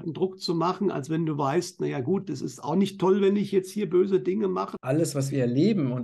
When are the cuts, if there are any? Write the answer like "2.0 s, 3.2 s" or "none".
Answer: 4.7 s

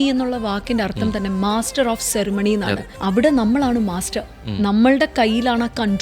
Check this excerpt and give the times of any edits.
2.9 s

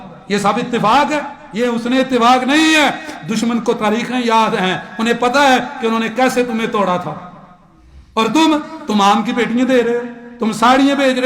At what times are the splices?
1.4 s

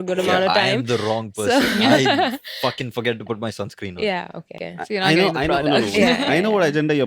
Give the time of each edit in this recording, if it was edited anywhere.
4.5 s

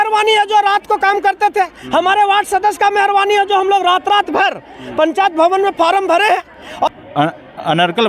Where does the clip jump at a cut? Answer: 6.9 s

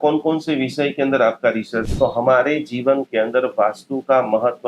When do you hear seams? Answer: 1.8 s

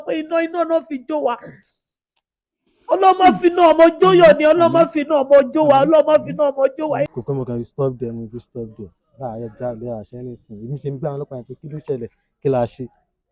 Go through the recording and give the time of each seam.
7.1 s

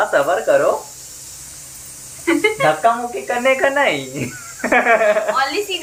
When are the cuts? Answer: none

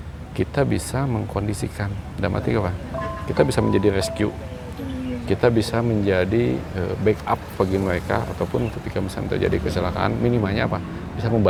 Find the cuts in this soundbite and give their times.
none

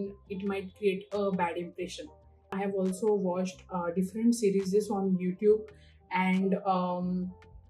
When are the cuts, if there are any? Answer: 2.5 s

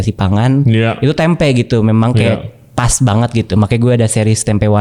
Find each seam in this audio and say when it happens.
none

